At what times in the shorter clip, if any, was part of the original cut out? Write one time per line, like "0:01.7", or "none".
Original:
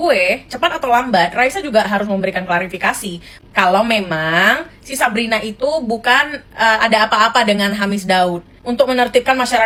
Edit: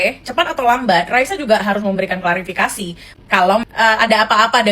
0:03.6